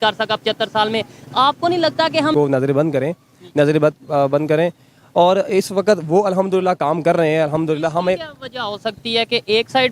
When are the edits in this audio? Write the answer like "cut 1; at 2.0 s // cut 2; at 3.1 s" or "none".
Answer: cut 1; at 2.3 s